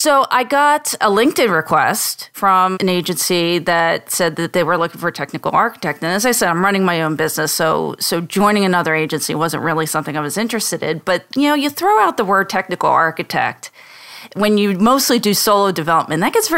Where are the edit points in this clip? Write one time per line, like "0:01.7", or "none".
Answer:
0:01.0
0:02.5